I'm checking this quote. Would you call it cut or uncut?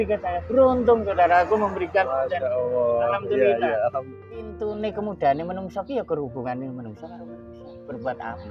cut